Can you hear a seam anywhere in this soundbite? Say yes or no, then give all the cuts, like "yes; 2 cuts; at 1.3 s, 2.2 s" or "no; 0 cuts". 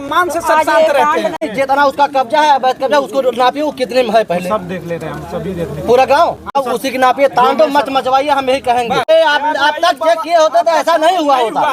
yes; 3 cuts; at 1.4 s, 6.8 s, 9.1 s